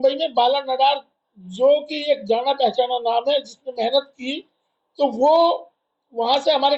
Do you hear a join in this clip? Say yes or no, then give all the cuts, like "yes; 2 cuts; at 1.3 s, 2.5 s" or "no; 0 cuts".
no; 0 cuts